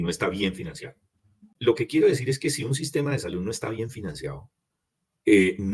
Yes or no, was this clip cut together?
yes